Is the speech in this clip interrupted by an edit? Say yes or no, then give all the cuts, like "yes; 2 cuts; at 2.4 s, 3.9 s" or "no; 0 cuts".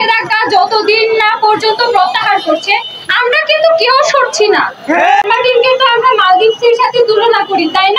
yes; 1 cut; at 5.2 s